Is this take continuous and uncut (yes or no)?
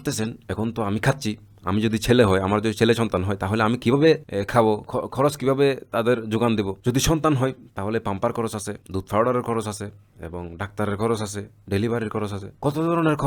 yes